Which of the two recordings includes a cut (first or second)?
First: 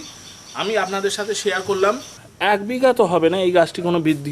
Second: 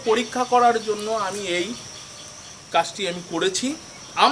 first